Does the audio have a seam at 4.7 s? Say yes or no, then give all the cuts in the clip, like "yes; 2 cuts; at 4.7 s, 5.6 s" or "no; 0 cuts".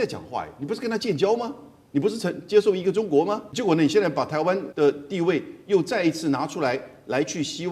yes; 2 cuts; at 3.5 s, 4.7 s